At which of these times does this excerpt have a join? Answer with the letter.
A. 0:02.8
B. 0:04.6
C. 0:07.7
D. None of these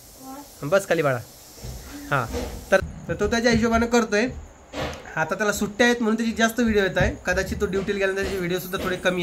A